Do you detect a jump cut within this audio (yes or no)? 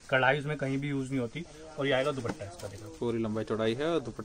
no